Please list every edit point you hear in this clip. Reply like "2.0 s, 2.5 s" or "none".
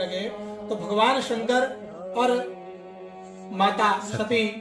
none